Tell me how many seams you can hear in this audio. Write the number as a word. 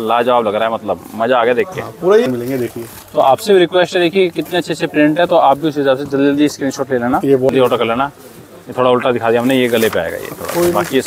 two